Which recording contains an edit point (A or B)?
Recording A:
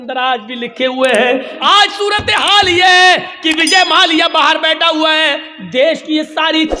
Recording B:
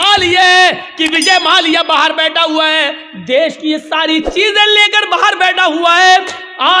A